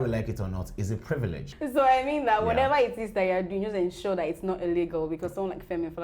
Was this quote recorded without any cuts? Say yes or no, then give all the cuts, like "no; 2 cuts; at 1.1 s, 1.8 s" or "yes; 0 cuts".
no; 1 cut; at 1.5 s